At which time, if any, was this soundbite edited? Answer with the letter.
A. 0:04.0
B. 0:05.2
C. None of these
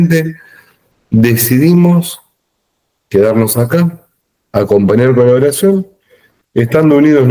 C